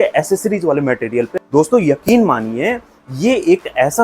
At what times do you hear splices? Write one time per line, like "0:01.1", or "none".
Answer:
0:01.3